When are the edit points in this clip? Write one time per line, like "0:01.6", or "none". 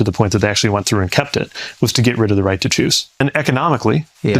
0:03.2

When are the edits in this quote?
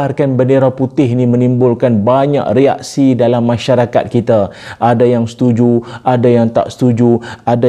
none

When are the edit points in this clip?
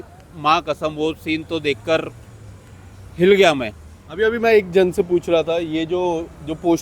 none

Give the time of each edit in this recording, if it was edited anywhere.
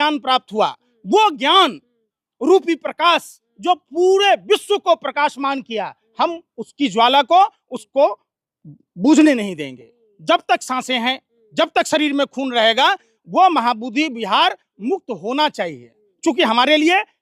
none

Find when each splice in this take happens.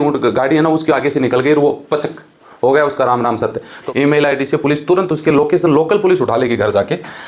0:03.8

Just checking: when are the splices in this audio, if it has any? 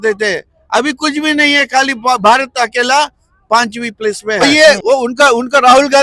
0:04.4

